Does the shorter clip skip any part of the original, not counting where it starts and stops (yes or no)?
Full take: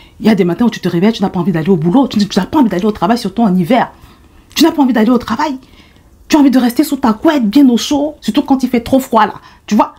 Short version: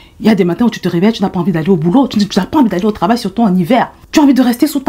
yes